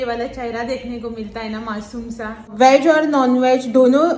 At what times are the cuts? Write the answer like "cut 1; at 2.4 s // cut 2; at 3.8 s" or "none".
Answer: cut 1; at 2.4 s

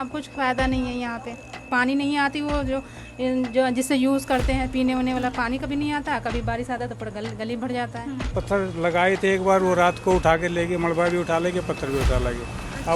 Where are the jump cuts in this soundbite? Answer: cut 1; at 1.7 s // cut 2; at 8.3 s

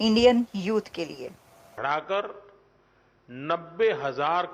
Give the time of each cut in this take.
cut 1; at 1.7 s

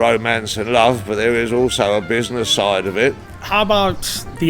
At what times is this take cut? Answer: cut 1; at 3.2 s

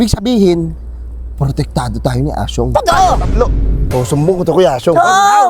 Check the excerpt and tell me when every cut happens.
cut 1; at 3.9 s

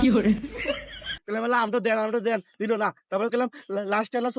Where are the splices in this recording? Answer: cut 1; at 1.2 s

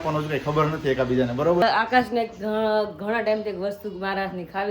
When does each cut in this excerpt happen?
cut 1; at 1.6 s

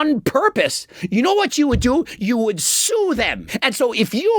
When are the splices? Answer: cut 1; at 3.4 s

